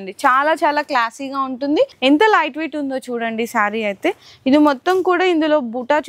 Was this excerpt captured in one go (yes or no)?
no